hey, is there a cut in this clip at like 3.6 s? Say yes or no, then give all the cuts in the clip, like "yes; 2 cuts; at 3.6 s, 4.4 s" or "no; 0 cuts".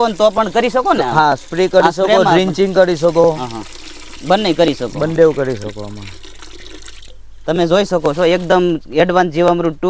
no; 0 cuts